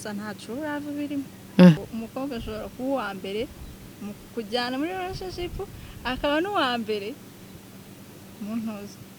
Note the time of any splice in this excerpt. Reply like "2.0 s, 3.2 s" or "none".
1.8 s